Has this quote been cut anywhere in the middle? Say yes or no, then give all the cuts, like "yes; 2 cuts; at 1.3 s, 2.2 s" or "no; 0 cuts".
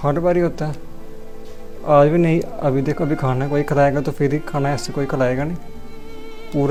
no; 0 cuts